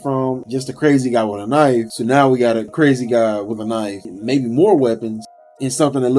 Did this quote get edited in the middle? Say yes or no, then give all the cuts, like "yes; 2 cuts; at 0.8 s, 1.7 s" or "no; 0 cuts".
yes; 1 cut; at 1.9 s